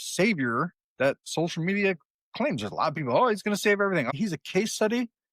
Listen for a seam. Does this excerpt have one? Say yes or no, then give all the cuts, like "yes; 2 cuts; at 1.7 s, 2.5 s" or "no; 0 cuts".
yes; 1 cut; at 4.1 s